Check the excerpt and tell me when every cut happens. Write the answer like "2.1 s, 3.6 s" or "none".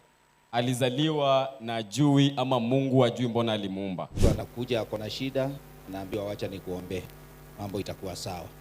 4.0 s